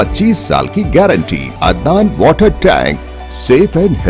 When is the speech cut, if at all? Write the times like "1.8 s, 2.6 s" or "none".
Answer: 1.5 s